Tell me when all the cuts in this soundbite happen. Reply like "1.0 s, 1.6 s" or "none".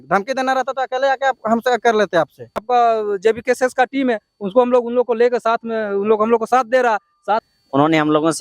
2.6 s, 7.5 s